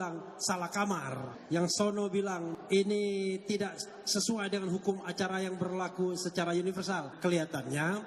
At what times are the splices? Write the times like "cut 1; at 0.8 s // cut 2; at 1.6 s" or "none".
cut 1; at 1.3 s // cut 2; at 2.5 s // cut 3; at 7.1 s